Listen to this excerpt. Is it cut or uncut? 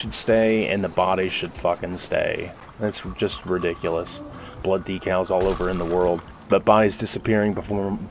cut